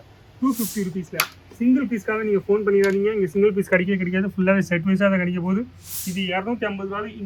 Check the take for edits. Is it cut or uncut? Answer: uncut